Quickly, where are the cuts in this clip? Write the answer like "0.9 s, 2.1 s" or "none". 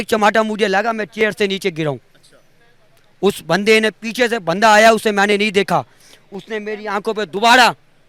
none